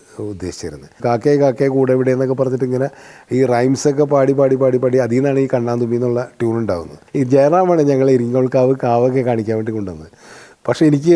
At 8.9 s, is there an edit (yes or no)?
no